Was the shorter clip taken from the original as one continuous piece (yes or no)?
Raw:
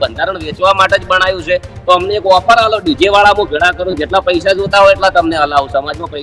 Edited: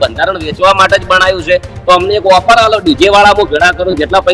yes